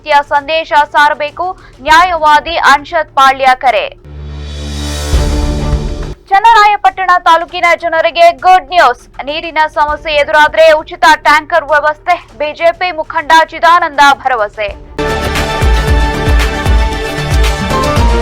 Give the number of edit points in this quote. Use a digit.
1